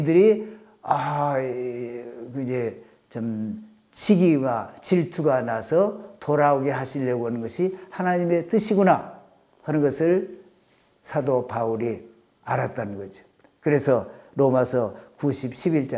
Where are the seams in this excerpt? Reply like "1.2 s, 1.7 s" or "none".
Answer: none